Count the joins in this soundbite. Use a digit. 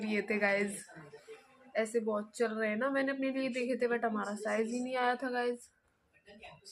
0